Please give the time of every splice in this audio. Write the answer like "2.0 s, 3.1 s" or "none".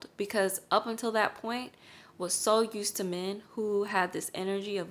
none